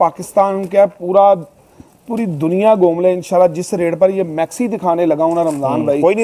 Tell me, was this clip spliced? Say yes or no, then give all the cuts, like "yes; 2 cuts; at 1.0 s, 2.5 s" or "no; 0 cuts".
no; 0 cuts